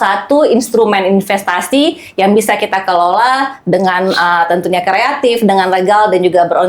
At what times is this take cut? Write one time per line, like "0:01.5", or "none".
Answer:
none